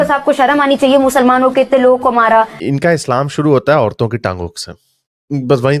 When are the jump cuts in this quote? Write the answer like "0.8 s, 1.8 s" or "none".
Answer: 2.6 s